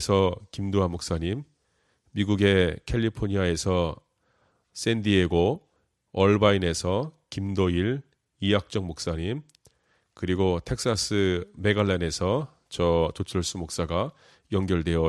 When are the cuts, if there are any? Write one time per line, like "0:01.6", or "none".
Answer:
none